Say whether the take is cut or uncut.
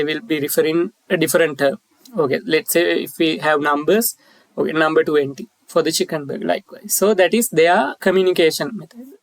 cut